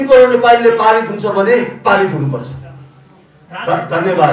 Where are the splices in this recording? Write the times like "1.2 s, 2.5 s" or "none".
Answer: none